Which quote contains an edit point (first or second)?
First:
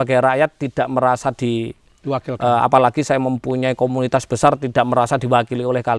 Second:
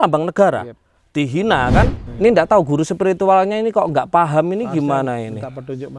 second